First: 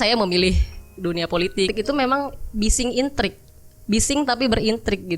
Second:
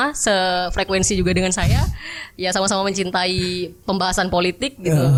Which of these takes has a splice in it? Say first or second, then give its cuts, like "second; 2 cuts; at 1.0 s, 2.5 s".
first; 1 cut; at 1.7 s